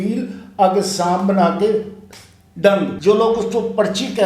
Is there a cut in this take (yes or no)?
yes